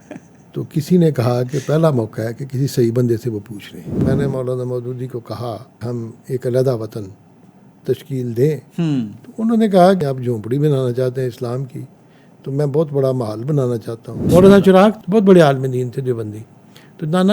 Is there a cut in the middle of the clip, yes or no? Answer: yes